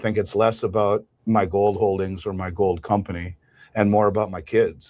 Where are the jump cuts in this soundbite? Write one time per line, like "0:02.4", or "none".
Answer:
0:01.1